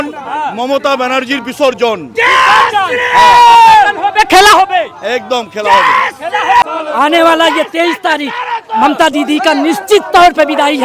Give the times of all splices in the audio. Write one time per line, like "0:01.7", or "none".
0:06.6